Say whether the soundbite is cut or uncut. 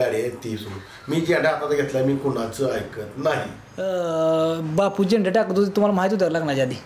cut